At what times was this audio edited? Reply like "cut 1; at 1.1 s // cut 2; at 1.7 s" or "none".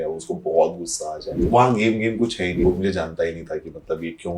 cut 1; at 1.4 s // cut 2; at 2.6 s